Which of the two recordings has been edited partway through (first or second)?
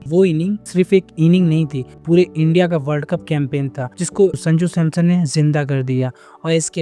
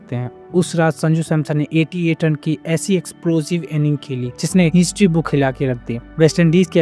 first